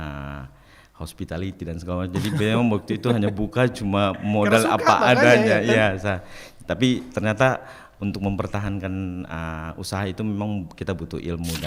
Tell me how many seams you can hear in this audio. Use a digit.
0